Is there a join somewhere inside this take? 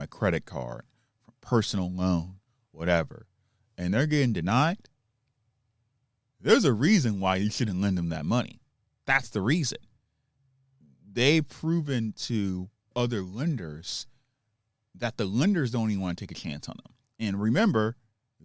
no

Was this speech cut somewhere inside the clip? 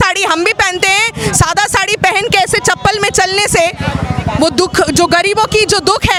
no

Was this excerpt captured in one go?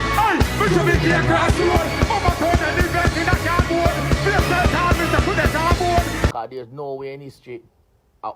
no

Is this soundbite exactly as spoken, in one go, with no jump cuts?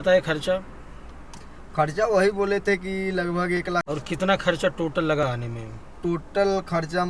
no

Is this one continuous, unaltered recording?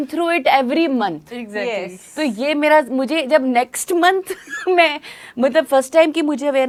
yes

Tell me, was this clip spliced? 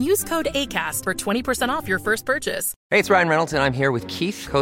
yes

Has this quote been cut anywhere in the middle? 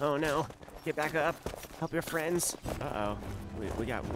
no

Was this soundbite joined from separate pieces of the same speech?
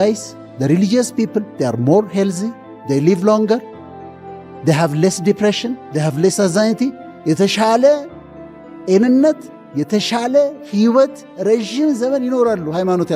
no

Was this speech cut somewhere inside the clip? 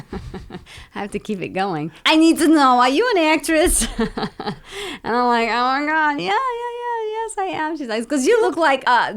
yes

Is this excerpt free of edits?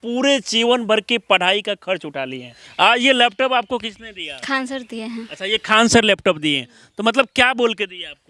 yes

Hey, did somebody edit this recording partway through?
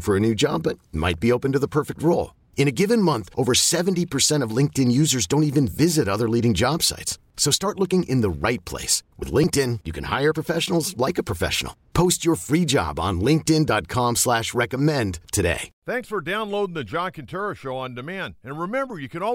yes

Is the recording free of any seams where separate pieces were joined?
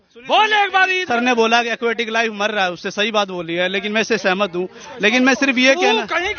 no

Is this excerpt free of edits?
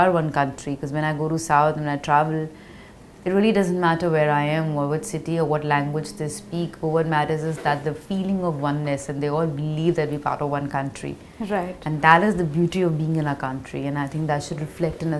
yes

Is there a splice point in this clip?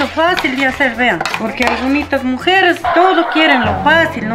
yes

